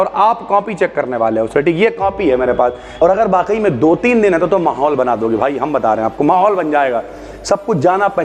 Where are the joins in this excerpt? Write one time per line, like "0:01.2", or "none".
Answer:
0:02.8